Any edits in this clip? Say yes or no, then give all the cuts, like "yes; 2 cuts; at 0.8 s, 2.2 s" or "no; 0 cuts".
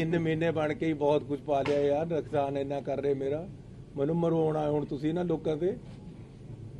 no; 0 cuts